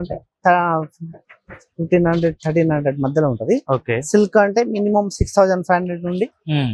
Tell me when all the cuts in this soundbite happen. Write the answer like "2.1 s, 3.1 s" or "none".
none